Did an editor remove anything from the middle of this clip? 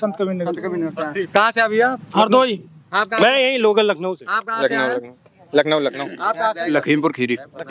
no; 0 cuts

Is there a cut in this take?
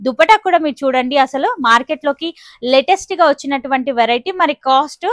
no; 0 cuts

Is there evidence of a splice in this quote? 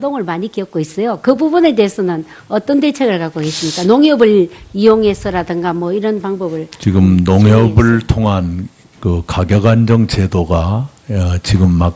yes; 1 cut; at 11.0 s

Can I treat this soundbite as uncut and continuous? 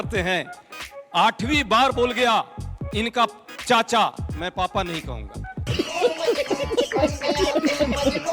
yes; 0 cuts

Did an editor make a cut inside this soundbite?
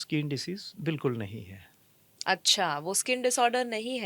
no; 0 cuts

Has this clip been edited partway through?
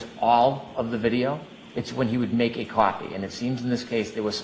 yes; 1 cut; at 1.6 s

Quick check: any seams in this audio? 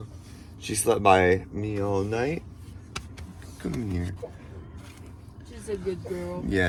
no; 0 cuts

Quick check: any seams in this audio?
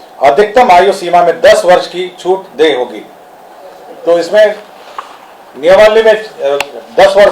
no; 0 cuts

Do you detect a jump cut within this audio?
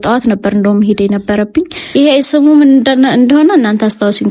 yes; 1 cut; at 1.8 s

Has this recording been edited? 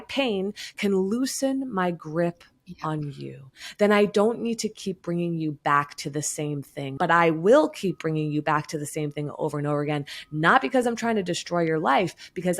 yes; 1 cut; at 6.9 s

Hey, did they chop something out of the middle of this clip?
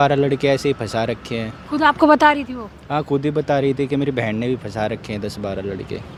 no; 0 cuts

